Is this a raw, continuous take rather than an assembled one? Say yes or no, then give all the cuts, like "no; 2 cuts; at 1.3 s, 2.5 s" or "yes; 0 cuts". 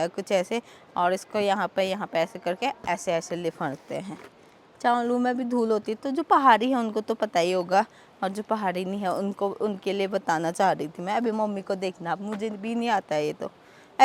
yes; 0 cuts